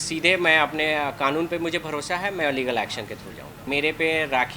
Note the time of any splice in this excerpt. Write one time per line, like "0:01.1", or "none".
0:03.5